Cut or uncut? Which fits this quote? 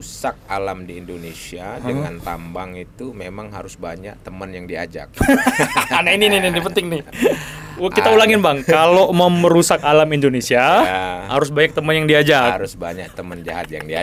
uncut